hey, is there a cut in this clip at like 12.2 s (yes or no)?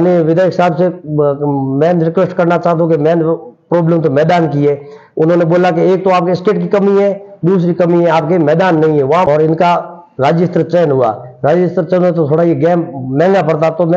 no